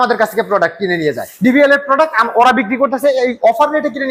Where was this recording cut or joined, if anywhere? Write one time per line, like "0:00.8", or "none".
none